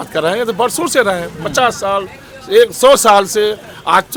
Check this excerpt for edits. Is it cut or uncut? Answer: uncut